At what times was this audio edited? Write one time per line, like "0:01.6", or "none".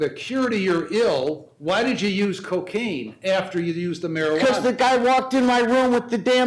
none

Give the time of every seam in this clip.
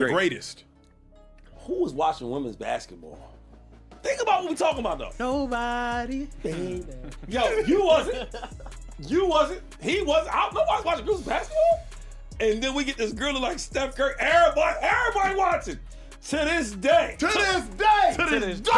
none

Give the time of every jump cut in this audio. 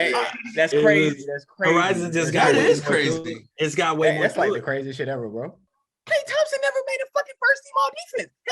0:05.6

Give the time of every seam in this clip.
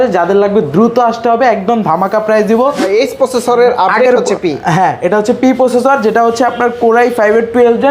0:02.9

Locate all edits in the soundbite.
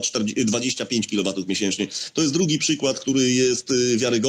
none

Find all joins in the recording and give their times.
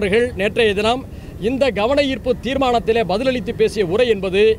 none

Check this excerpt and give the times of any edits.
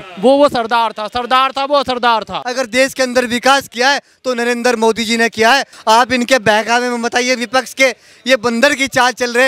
0:02.4
0:05.7

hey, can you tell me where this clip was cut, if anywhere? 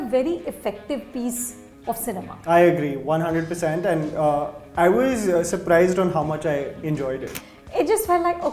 0:07.3

